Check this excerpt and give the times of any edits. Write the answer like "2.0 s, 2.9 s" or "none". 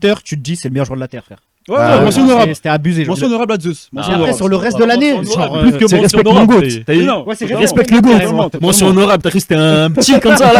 none

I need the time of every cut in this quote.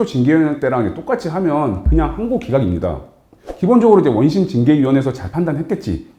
none

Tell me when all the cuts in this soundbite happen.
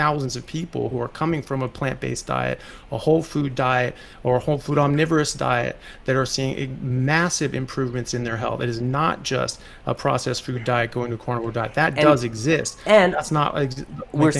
none

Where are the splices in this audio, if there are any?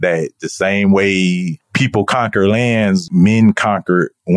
none

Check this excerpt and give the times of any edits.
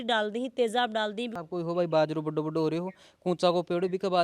1.3 s

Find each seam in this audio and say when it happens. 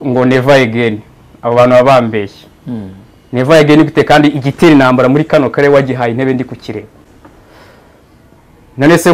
none

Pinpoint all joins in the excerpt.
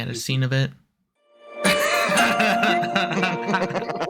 1.5 s

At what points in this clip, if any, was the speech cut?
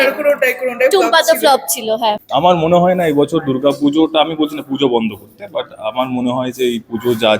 2.2 s

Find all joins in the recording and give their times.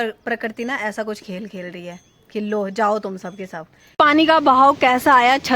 3.9 s

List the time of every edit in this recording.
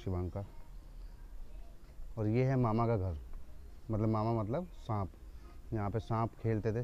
none

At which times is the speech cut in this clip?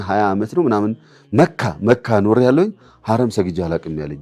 none

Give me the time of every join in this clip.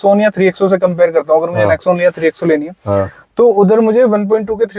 none

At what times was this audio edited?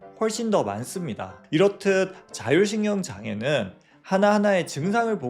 1.4 s

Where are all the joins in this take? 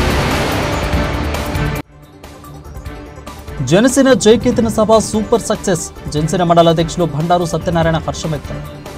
3.2 s

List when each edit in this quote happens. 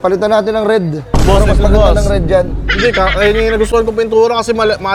none

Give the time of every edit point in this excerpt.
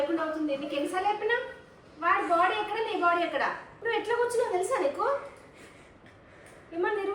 3.7 s

